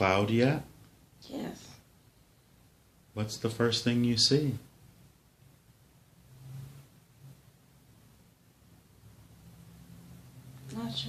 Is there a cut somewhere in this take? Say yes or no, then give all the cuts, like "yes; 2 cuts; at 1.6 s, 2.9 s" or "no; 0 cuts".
no; 0 cuts